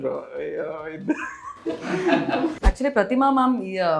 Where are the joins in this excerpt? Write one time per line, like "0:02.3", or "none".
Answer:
0:02.5